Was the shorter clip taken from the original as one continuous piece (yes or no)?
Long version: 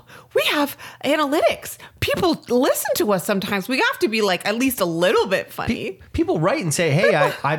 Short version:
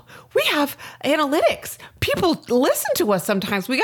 yes